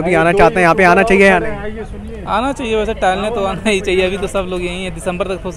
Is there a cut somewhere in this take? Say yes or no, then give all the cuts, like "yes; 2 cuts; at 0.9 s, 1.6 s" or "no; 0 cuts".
no; 0 cuts